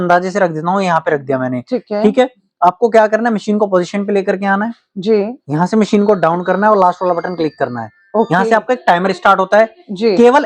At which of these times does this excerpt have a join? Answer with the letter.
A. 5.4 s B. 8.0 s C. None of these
C